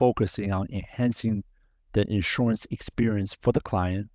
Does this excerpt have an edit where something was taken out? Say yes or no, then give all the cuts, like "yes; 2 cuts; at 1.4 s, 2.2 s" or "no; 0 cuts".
no; 0 cuts